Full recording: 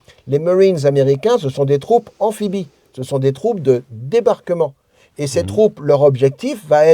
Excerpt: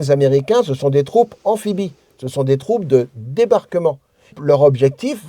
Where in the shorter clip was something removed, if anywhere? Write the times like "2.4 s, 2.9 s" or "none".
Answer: 4.4 s